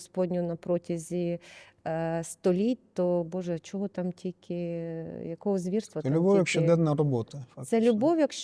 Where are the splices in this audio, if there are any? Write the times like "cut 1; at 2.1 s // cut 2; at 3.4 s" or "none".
none